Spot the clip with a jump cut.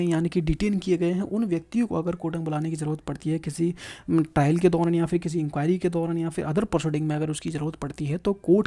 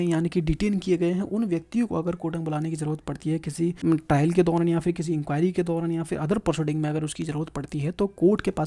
second; 1 cut; at 3.8 s

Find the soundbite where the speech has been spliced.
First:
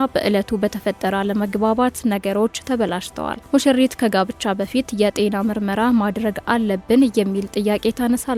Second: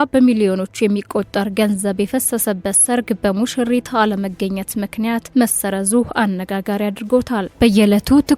second; 1 cut; at 7.5 s

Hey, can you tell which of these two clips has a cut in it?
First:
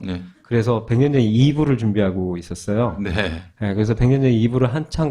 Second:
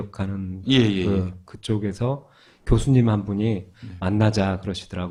first; 1 cut; at 1.2 s

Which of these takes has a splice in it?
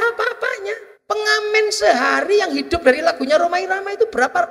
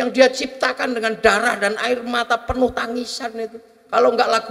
first; 1 cut; at 0.9 s

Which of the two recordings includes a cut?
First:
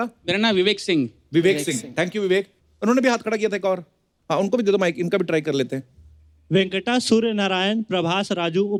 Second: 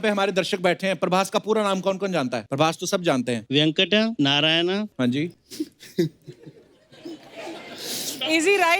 second; 4 cuts; at 2.4 s, 3.4 s, 4.1 s, 5.2 s

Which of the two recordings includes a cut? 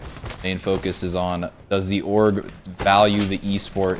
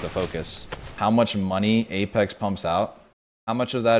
second; 2 cuts; at 0.9 s, 3.0 s

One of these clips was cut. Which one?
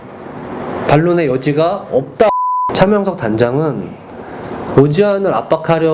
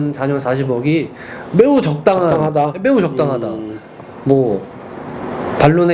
first; 1 cut; at 2.3 s

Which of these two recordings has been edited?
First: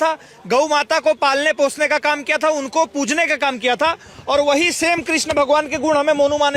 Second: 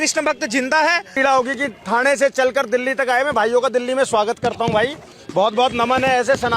second; 1 cut; at 1.1 s

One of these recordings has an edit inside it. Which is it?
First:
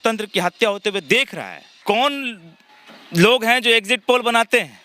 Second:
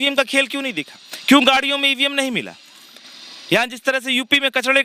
first; 1 cut; at 1.7 s

